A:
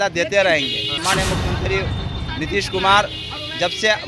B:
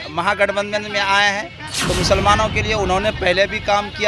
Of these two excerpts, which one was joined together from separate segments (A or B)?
A